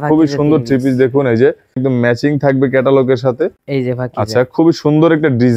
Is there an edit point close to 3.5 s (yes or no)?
no